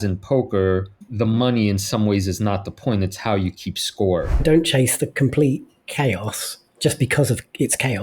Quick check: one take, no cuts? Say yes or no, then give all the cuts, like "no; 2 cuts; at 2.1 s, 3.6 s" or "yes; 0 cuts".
no; 2 cuts; at 1.0 s, 4.4 s